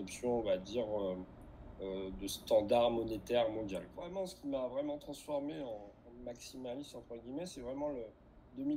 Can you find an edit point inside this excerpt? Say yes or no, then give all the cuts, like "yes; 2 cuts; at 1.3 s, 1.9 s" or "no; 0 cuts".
yes; 1 cut; at 4.0 s